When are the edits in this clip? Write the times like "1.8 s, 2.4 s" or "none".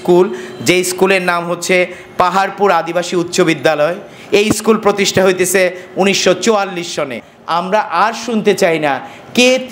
7.3 s